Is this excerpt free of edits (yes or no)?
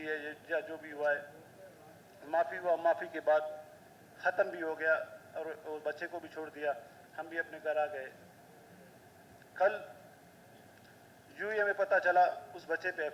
yes